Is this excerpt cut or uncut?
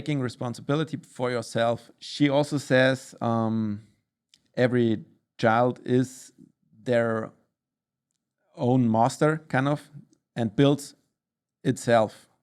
cut